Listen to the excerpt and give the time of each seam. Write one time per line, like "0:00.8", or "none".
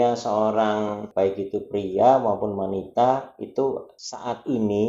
0:01.0
0:03.9